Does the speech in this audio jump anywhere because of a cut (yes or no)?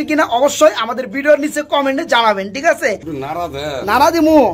yes